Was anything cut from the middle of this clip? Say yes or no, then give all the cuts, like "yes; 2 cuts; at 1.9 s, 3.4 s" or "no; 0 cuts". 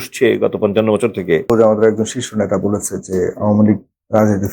yes; 1 cut; at 1.5 s